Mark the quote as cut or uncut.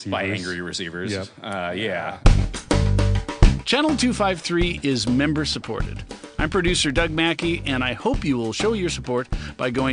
cut